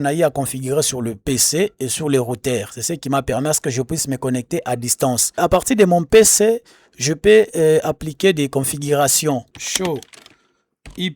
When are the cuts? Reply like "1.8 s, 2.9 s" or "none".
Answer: 5.4 s, 9.6 s